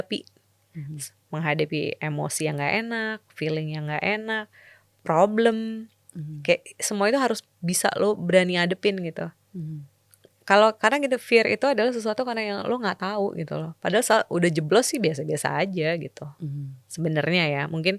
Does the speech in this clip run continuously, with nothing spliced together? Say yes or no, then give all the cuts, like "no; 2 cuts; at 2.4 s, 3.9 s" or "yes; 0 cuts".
yes; 0 cuts